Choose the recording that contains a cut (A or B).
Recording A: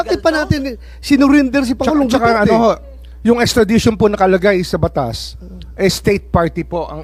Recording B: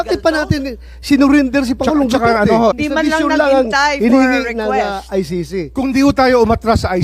B